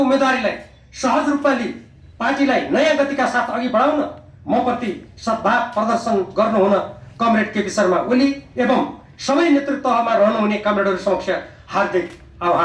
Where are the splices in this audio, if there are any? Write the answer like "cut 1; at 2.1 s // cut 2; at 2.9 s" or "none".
none